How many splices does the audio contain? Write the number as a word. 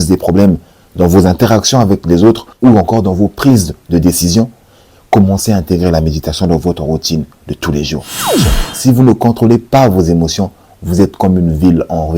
one